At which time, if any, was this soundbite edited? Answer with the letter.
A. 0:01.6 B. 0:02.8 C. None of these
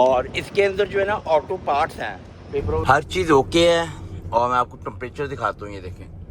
B